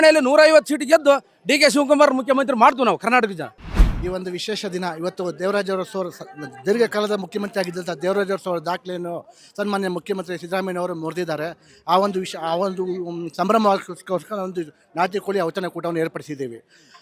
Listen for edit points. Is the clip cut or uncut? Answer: uncut